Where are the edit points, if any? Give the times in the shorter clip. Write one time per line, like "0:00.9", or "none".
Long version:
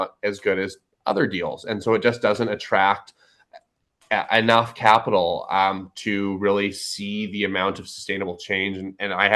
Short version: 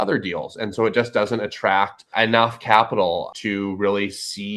0:02.1
0:03.3